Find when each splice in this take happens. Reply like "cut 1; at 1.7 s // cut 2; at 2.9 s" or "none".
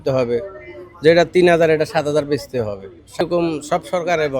cut 1; at 3.2 s